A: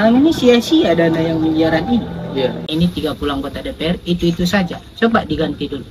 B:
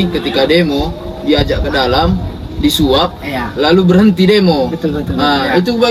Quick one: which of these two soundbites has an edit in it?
A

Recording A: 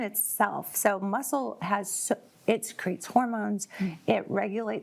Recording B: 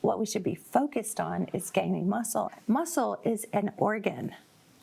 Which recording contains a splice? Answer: B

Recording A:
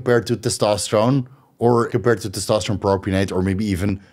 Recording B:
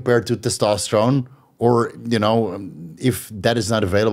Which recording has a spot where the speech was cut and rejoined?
A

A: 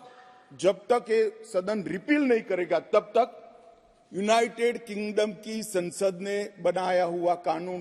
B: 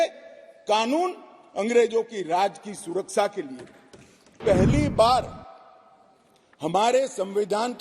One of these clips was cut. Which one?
B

